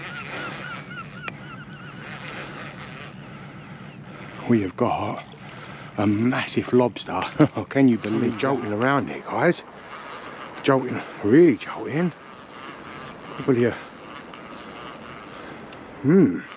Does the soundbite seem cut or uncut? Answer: cut